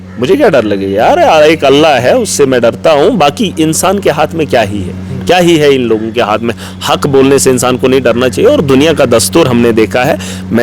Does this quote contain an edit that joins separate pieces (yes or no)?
no